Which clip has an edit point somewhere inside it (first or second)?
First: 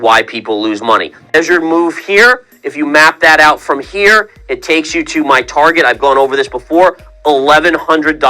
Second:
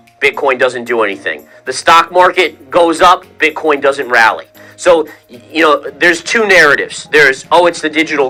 first